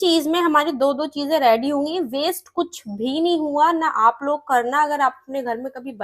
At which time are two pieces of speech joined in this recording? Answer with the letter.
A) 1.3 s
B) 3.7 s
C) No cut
C